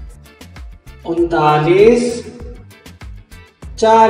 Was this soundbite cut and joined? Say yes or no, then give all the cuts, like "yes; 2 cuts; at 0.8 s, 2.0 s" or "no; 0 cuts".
no; 0 cuts